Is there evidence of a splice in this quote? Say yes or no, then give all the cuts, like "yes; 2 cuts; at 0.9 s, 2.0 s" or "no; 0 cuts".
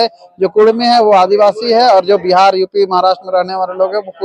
no; 0 cuts